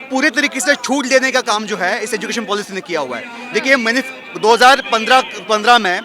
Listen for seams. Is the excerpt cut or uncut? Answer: uncut